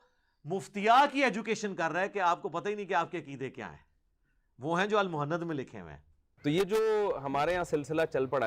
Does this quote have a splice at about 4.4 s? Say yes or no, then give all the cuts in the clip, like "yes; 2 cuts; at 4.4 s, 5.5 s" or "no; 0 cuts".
no; 1 cut; at 6.3 s